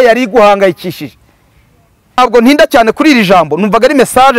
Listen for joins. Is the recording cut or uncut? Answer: cut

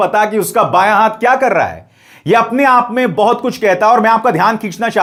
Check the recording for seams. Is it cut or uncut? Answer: uncut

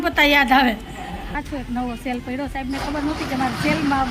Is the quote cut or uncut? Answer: cut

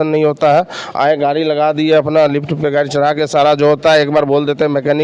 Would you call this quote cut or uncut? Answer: uncut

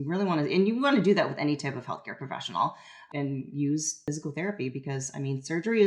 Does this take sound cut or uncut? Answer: cut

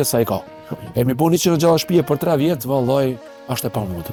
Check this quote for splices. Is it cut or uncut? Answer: uncut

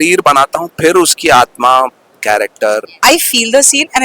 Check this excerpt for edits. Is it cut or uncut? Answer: cut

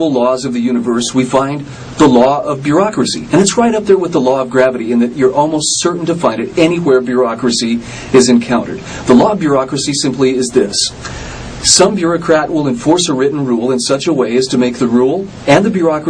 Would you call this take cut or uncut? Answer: cut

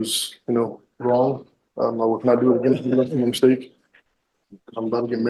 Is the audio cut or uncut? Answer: uncut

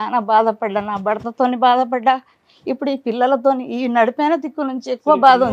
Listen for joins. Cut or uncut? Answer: uncut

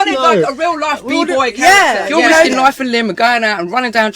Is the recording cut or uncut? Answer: cut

